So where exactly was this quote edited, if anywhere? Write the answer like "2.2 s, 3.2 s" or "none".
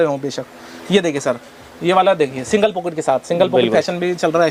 none